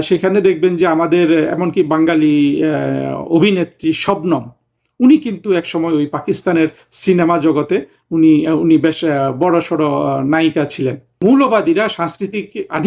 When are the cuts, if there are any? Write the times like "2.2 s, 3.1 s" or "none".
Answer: 11.1 s